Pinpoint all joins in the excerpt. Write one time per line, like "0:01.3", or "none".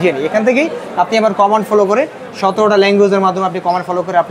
none

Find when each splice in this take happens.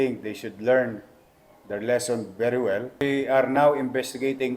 0:03.0

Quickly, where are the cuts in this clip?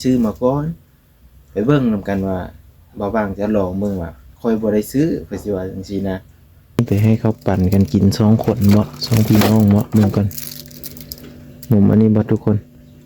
0:06.8

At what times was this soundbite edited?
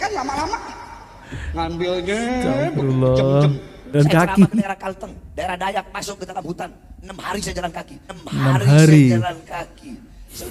0:03.9

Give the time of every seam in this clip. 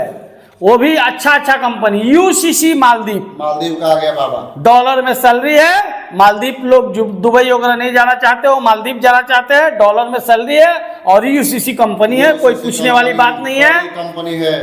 none

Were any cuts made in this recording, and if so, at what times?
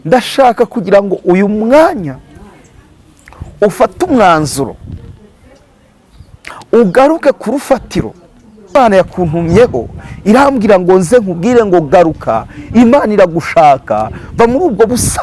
0:08.7

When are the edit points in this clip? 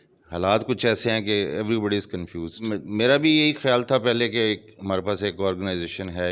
0:02.6

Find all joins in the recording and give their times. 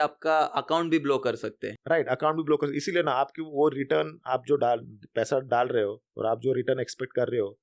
none

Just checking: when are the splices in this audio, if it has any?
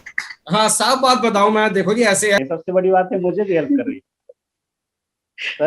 0:02.4

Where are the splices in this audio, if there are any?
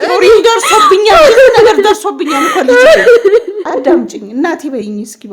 0:03.6

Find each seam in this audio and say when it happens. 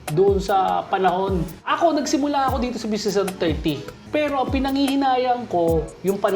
0:01.7
0:03.9

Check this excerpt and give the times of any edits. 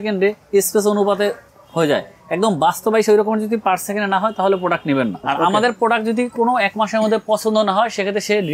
0:05.2

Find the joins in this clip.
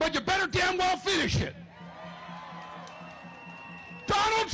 none

